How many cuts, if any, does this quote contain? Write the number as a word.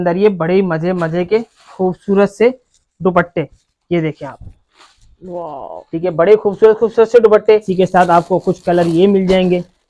one